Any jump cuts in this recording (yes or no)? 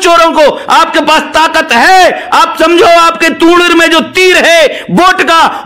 no